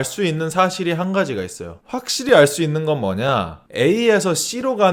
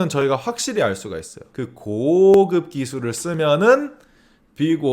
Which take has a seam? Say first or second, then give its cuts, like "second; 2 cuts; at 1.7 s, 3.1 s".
second; 1 cut; at 1.4 s